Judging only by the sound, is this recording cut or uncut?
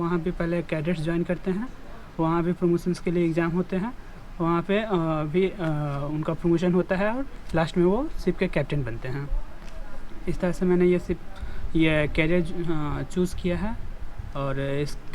uncut